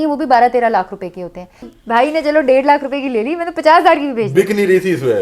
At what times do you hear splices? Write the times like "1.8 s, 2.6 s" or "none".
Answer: 1.7 s